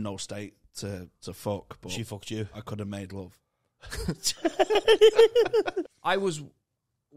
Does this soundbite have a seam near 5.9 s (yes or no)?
yes